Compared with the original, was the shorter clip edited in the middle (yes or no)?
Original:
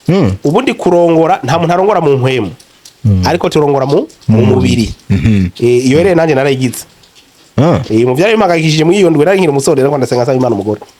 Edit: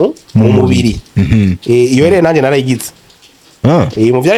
no